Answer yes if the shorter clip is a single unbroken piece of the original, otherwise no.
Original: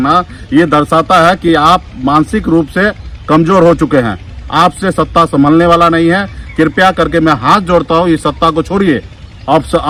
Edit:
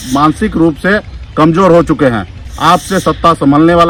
yes